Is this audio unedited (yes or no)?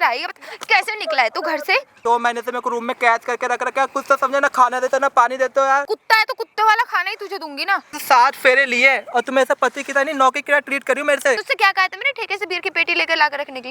no